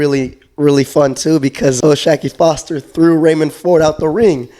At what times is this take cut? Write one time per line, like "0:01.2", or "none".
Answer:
0:01.8

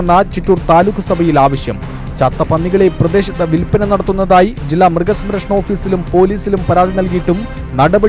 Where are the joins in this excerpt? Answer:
none

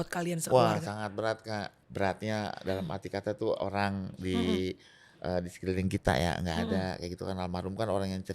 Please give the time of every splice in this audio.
0:01.8
0:03.6

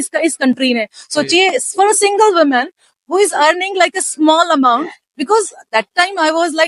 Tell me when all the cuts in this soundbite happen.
none

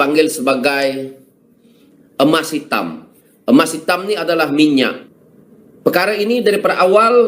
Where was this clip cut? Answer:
0:05.1

